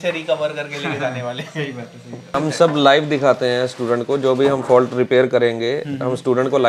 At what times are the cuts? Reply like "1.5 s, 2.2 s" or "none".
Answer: 2.3 s